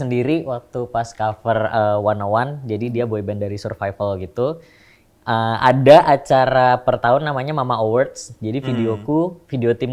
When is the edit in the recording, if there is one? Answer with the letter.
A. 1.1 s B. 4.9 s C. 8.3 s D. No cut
D